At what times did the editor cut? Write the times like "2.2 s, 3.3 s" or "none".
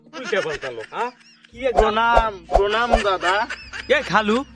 none

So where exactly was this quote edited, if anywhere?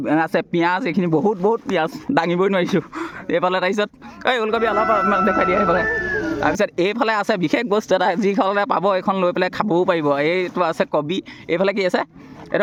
none

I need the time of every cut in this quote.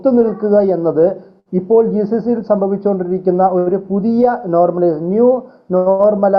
none

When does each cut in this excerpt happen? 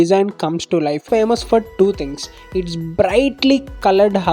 1.0 s

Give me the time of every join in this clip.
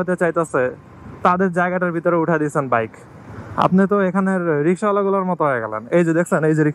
none

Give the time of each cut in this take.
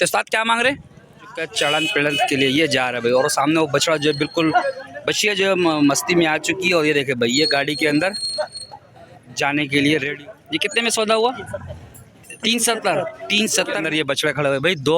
1.4 s, 10.1 s, 13.8 s

